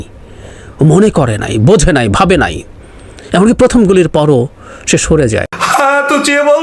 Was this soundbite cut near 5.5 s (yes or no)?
yes